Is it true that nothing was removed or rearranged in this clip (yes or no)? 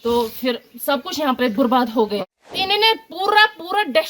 no